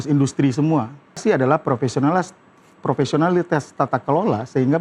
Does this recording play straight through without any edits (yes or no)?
no